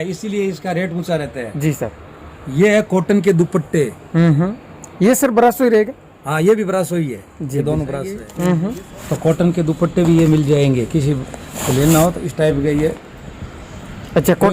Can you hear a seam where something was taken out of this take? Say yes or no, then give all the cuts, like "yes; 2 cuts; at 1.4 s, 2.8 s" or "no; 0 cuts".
yes; 1 cut; at 8.2 s